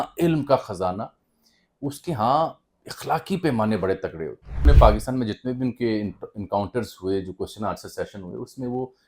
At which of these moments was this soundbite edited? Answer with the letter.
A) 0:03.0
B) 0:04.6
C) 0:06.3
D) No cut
B